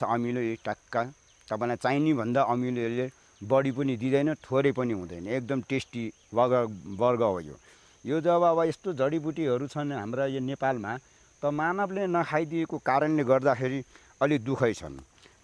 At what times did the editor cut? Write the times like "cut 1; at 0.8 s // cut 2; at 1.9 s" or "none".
none